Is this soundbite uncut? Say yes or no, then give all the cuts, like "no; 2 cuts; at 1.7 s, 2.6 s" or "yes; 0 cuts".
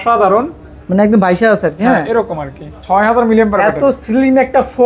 yes; 0 cuts